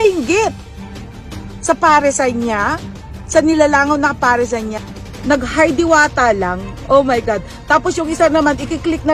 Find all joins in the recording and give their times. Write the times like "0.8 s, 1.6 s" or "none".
4.8 s